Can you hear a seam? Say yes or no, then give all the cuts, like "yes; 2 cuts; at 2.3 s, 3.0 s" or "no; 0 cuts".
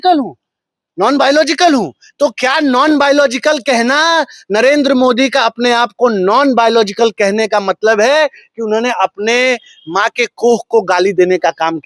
no; 0 cuts